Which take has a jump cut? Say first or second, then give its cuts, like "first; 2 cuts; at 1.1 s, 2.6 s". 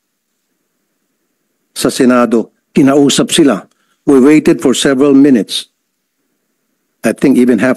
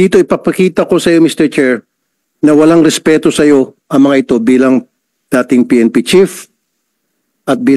first; 1 cut; at 2.6 s